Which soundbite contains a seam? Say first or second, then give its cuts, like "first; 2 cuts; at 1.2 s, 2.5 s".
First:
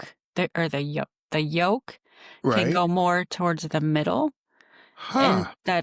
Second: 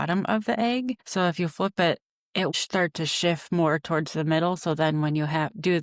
second; 2 cuts; at 1.0 s, 2.5 s